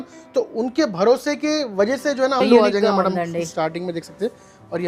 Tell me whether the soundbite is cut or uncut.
cut